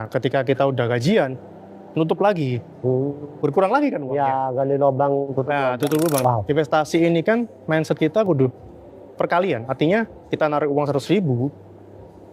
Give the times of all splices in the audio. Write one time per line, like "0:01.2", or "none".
0:06.2